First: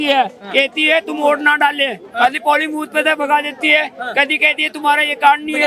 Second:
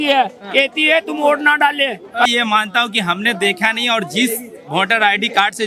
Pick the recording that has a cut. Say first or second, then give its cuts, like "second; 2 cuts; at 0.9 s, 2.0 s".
second; 1 cut; at 2.3 s